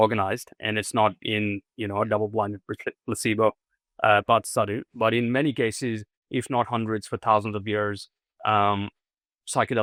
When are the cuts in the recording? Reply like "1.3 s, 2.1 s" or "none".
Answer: none

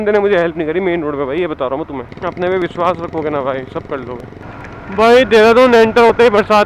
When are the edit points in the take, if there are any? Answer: 2.1 s, 4.3 s

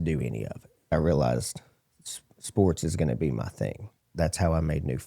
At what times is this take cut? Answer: 0.9 s, 4.0 s

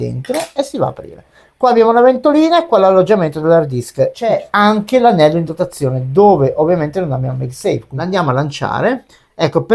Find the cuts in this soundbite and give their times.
4.3 s, 7.9 s

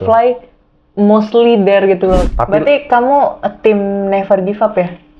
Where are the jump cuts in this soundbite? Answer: 2.3 s

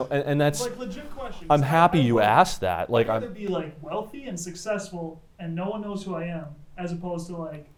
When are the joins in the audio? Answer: none

